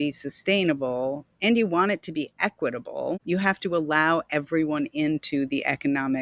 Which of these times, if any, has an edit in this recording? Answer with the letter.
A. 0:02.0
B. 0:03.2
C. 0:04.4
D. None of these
B